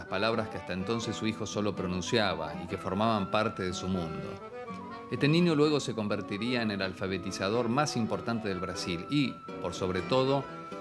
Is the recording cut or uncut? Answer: cut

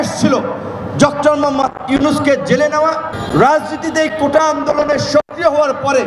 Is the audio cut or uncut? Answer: cut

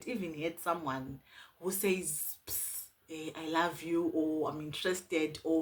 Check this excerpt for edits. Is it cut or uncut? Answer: uncut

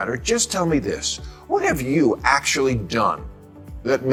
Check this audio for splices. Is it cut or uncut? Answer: uncut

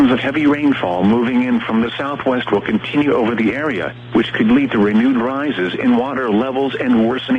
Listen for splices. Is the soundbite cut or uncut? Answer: cut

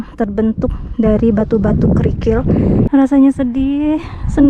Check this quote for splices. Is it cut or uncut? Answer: cut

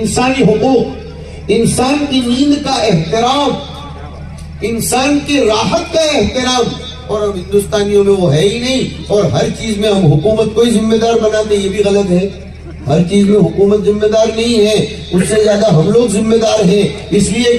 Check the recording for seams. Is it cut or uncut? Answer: uncut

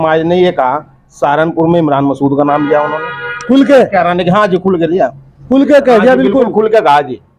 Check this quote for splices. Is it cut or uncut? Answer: uncut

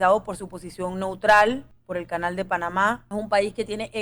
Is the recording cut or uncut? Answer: cut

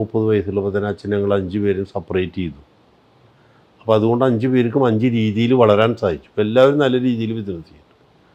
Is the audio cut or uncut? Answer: uncut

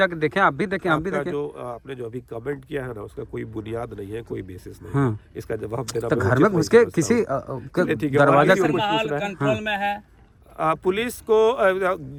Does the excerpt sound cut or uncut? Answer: uncut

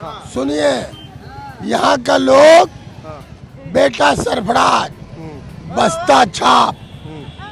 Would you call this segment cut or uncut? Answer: uncut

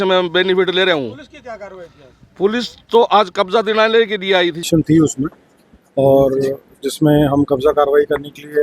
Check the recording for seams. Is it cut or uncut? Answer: cut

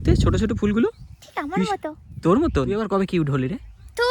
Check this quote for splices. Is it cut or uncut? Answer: cut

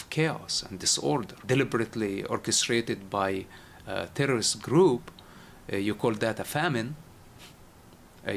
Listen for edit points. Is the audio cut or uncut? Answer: cut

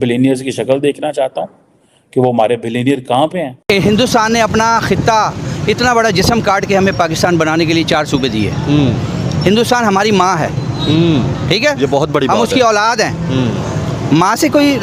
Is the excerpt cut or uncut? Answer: cut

